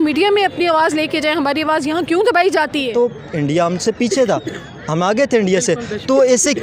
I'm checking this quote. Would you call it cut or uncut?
cut